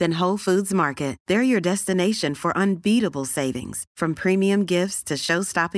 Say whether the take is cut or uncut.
uncut